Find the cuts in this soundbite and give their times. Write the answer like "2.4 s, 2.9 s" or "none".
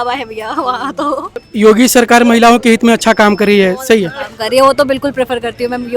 1.4 s